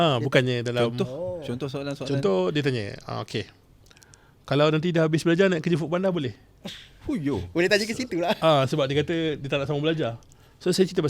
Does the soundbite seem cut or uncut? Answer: uncut